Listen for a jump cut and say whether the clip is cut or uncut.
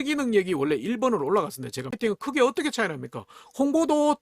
cut